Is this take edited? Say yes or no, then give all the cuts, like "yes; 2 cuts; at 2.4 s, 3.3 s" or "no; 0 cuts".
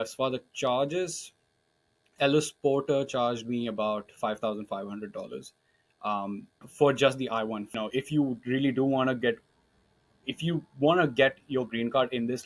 yes; 2 cuts; at 6.3 s, 7.7 s